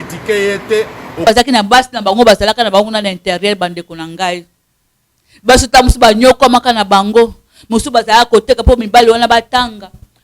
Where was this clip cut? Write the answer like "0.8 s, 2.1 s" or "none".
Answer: 1.2 s